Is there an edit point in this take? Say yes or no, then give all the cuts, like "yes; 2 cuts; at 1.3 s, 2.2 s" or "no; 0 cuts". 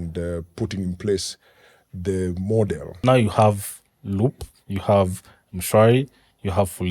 yes; 1 cut; at 2.9 s